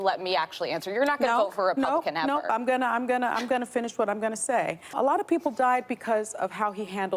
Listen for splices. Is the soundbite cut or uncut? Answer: cut